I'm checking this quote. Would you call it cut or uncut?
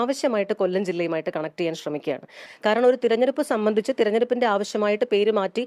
cut